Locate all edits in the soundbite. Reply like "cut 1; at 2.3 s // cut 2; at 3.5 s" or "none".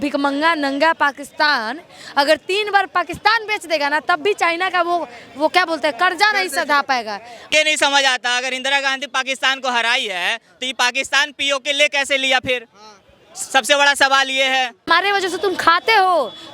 cut 1; at 7.5 s // cut 2; at 14.9 s